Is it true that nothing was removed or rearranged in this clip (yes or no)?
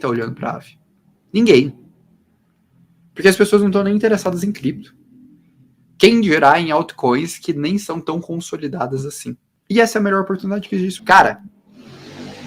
no